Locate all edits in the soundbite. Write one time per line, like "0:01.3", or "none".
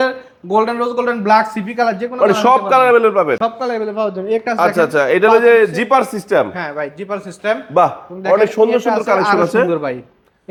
none

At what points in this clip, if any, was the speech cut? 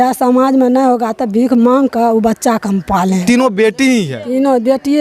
0:03.2

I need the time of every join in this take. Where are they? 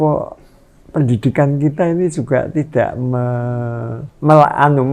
0:04.0

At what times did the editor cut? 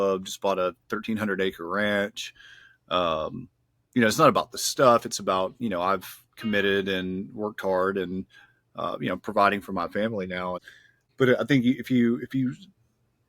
0:11.0

